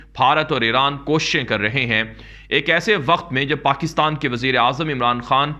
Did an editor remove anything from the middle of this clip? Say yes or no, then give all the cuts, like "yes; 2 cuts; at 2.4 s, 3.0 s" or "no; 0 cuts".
no; 0 cuts